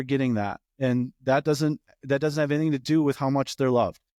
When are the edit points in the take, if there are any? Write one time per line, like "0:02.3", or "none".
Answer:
none